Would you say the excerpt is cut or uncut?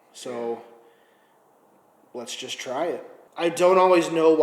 cut